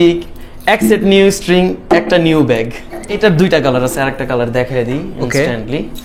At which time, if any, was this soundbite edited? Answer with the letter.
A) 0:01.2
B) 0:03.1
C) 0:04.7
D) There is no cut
B